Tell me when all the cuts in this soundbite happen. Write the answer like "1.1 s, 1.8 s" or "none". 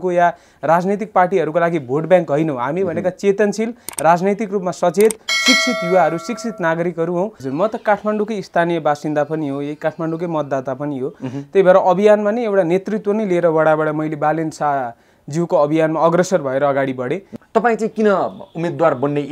7.4 s, 17.3 s